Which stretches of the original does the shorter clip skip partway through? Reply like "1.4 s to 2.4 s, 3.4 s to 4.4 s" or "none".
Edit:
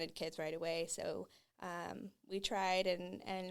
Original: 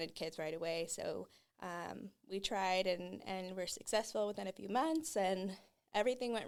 none